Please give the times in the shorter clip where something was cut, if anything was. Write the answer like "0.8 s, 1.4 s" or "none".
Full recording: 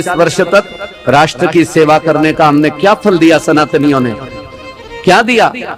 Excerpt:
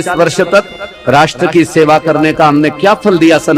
none